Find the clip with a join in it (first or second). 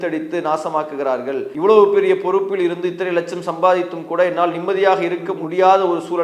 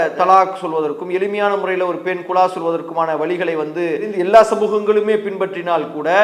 first